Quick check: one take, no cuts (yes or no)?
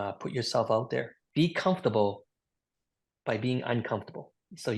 yes